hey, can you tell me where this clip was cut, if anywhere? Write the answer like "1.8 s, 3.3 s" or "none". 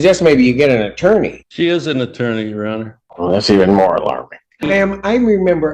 1.4 s, 3.0 s, 4.7 s